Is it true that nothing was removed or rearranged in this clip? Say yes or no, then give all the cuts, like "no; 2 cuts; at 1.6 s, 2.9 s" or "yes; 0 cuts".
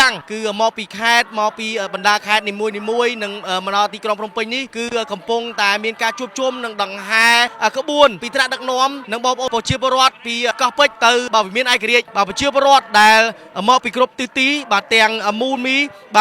no; 1 cut; at 12.1 s